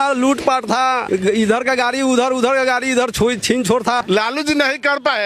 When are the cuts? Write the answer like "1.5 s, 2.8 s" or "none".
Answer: 1.0 s, 4.0 s